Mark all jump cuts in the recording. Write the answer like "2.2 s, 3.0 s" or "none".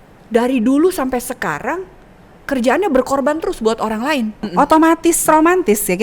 4.4 s